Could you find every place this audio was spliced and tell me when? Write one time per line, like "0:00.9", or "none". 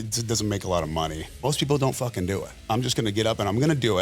0:01.3
0:02.6